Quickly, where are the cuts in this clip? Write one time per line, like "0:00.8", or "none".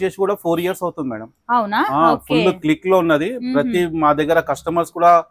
none